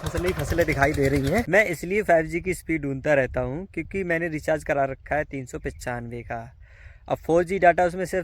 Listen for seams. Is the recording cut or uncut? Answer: cut